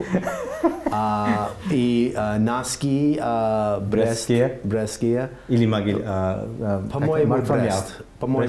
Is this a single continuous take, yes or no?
yes